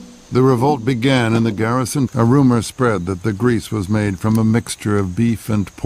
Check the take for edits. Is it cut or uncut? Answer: uncut